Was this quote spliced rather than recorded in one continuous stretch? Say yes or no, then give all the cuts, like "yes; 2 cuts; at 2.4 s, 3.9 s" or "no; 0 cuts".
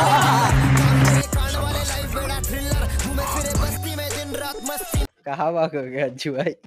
yes; 1 cut; at 5.1 s